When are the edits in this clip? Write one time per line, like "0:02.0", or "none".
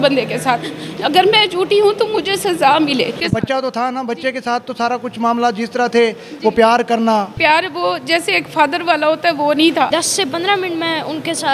0:03.2
0:07.3
0:09.9